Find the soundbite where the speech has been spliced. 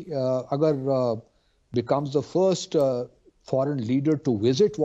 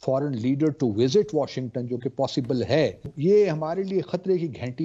second; 1 cut; at 3.1 s

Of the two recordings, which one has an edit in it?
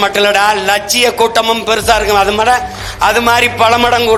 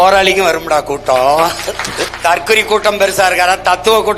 second; 1 cut; at 2.0 s

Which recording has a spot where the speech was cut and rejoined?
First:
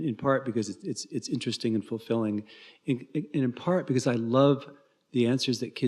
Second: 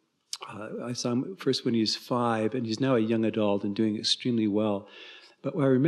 first; 1 cut; at 3.8 s

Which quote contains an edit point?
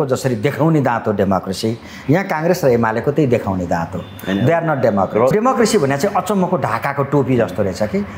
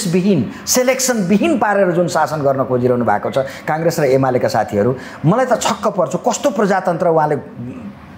first; 1 cut; at 5.3 s

